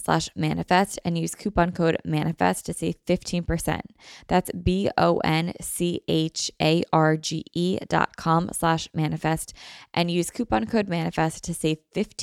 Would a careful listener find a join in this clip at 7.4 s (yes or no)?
no